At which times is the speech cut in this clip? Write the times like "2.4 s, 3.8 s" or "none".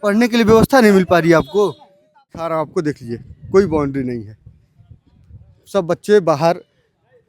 2.4 s